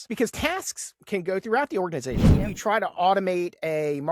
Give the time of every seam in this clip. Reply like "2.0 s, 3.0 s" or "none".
2.3 s